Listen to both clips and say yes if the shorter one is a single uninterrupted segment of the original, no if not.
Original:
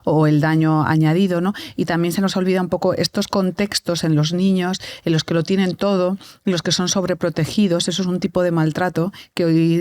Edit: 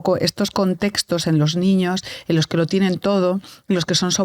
yes